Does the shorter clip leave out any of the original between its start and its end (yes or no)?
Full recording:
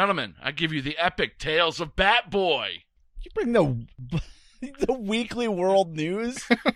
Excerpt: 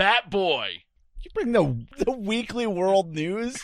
yes